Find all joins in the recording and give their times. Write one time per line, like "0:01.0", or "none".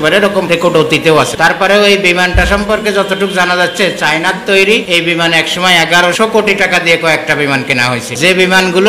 none